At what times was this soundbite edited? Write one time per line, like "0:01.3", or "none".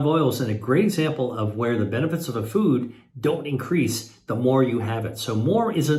none